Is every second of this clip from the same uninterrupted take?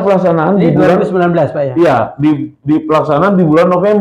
yes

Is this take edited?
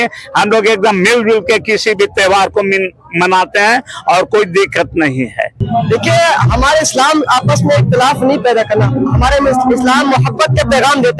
yes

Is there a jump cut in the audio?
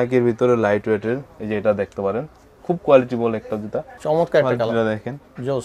yes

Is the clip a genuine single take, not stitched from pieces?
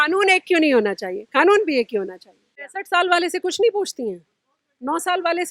no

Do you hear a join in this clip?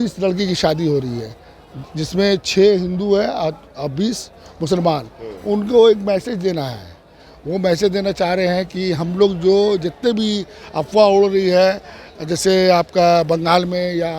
no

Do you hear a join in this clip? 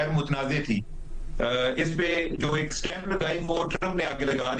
no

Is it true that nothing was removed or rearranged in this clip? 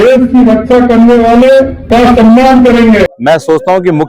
no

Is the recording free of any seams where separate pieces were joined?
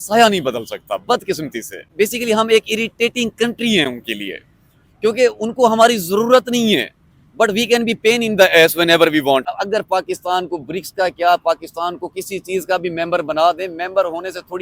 no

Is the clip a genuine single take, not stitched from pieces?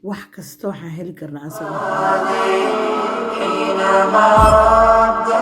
no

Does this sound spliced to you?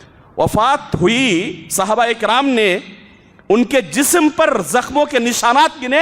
no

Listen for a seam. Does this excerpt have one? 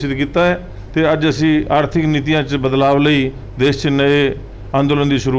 no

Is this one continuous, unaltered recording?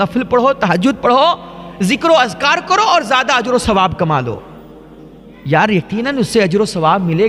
yes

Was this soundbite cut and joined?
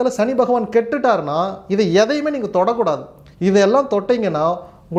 no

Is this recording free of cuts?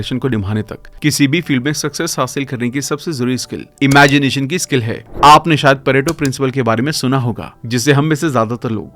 no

